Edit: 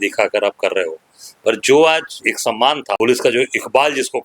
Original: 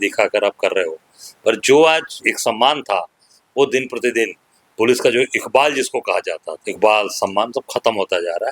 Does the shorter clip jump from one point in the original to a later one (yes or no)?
yes